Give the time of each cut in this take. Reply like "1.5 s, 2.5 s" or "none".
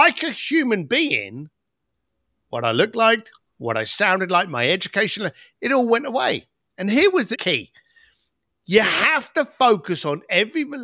7.4 s